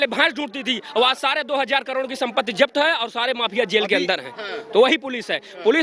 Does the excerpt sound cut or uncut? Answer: uncut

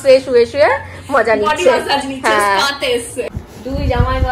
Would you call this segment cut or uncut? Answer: cut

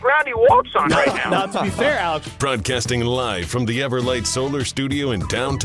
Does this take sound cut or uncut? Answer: cut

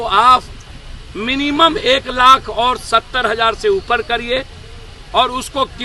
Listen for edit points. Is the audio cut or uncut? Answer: uncut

